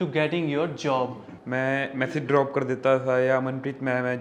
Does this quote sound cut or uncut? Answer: cut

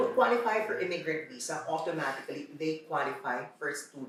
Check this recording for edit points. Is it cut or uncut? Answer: uncut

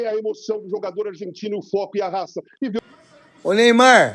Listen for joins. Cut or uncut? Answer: cut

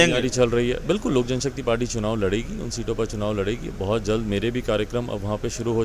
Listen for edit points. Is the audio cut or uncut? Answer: uncut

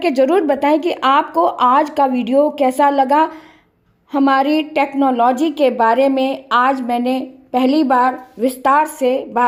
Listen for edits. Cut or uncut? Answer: uncut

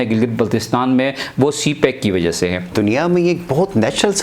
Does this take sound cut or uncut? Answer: cut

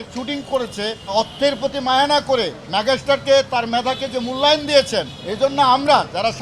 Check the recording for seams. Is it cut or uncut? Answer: cut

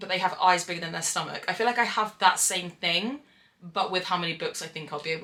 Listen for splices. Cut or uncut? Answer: uncut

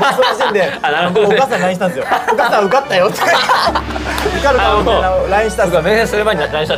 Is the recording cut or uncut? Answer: uncut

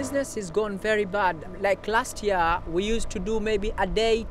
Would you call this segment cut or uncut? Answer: uncut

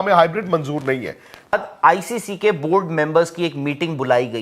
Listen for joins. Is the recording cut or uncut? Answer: cut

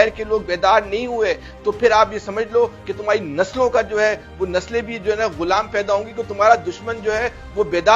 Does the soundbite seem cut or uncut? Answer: uncut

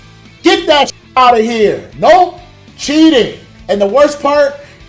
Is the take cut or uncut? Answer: uncut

